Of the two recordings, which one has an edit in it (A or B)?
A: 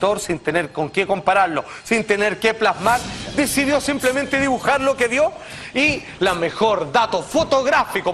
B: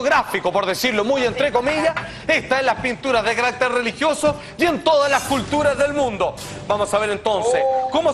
B